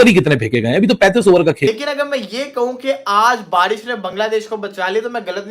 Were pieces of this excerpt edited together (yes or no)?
yes